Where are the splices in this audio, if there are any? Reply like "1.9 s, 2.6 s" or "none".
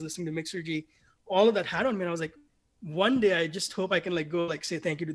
none